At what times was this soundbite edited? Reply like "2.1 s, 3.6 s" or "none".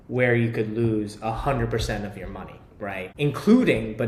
none